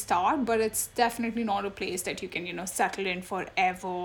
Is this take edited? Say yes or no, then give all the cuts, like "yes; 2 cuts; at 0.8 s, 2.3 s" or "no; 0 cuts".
no; 0 cuts